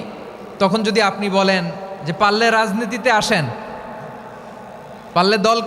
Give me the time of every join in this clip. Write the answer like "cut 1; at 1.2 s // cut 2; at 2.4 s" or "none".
none